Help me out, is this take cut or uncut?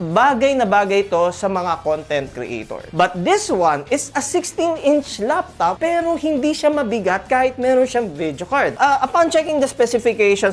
cut